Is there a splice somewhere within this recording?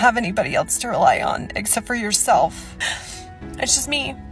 yes; 1 cut; at 2.8 s

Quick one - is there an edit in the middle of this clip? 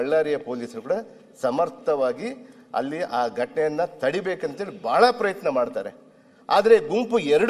no; 0 cuts

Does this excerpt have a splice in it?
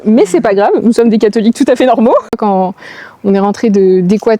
yes; 1 cut; at 2.3 s

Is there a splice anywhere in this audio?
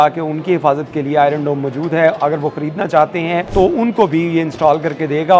yes; 1 cut; at 3.5 s

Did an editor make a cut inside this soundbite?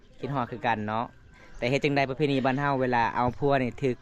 no; 0 cuts

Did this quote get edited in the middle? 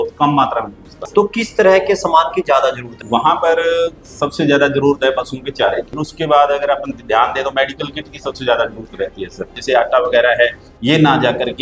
yes; 4 cuts; at 1.0 s, 3.0 s, 6.0 s, 9.6 s

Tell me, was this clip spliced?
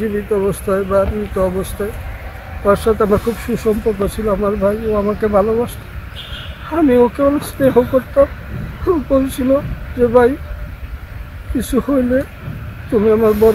no; 0 cuts

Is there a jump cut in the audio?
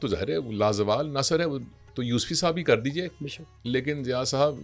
no; 0 cuts

